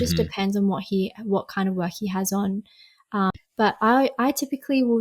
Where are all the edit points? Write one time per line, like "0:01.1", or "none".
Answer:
0:03.3